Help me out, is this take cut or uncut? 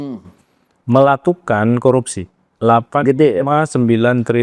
uncut